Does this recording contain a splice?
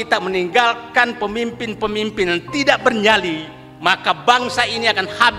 no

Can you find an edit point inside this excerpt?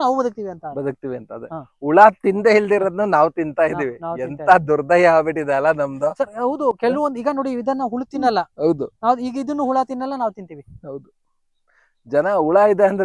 no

